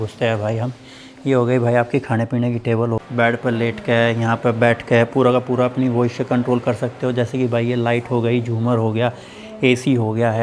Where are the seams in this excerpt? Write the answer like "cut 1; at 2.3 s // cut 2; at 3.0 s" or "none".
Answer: cut 1; at 3.0 s